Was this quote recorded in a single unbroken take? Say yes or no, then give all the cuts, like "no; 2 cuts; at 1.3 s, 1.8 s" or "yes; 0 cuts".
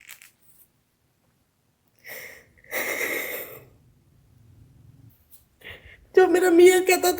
no; 1 cut; at 5.1 s